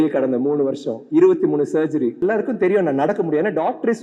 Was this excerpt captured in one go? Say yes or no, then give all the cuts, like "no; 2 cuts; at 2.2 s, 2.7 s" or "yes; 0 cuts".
no; 1 cut; at 2.2 s